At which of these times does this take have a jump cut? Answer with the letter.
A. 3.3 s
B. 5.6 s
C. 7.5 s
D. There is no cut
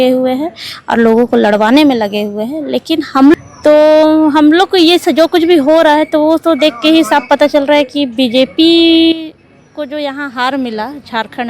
A